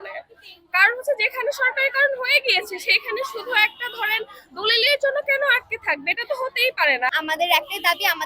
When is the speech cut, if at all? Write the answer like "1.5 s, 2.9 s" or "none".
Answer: 7.1 s